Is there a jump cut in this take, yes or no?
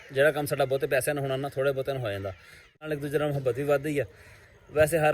yes